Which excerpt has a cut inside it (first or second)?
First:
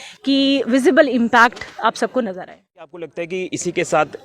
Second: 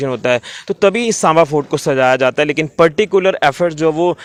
first